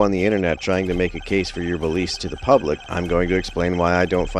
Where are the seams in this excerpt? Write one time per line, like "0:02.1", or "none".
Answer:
none

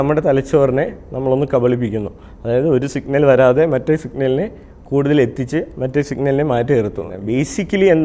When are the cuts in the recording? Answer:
0:07.1

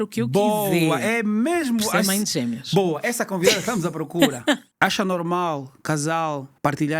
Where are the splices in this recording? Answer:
0:04.6

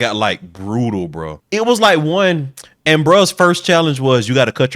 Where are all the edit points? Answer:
0:01.3

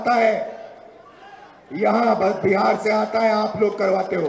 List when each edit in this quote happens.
none

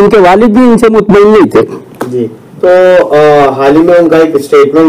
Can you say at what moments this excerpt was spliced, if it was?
none

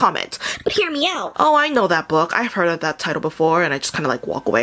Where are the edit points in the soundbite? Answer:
0:01.2

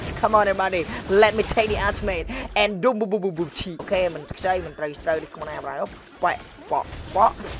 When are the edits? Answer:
0:03.7

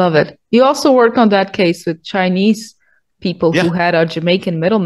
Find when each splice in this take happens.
none

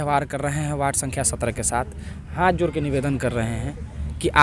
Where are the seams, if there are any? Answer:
none

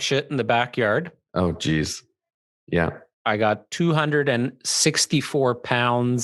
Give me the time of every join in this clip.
0:01.2
0:03.1

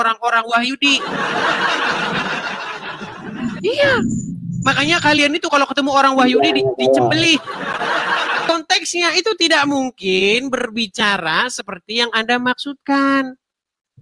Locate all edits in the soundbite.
0:08.5

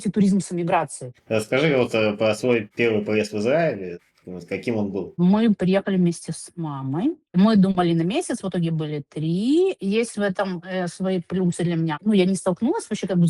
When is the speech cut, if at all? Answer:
none

